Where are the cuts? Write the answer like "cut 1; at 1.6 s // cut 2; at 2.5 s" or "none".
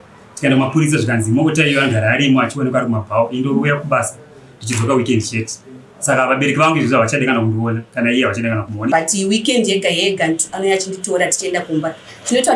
cut 1; at 8.9 s